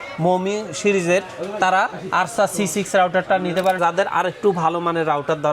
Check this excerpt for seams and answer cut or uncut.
cut